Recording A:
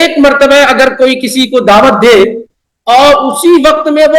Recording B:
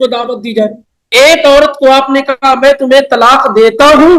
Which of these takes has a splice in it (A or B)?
B